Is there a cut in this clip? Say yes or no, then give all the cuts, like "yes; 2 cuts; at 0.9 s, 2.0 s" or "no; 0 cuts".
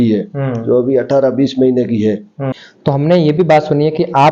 yes; 1 cut; at 2.5 s